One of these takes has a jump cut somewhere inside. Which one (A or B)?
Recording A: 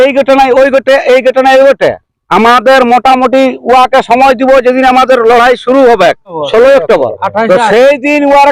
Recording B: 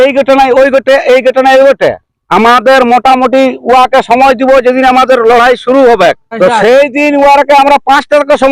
B